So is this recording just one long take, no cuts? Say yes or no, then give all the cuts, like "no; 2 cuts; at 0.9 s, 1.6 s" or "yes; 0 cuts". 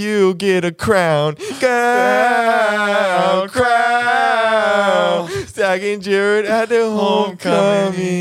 yes; 0 cuts